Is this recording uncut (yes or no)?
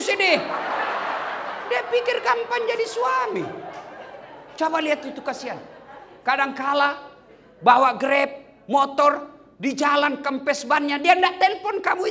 yes